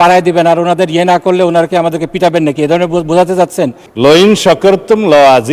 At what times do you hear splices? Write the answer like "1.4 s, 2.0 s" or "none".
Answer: 3.8 s